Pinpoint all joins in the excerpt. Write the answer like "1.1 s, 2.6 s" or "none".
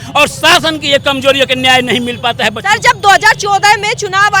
none